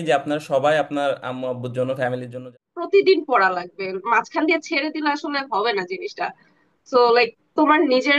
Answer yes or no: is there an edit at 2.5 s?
yes